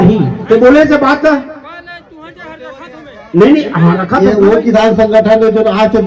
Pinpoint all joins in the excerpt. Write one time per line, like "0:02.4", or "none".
0:04.2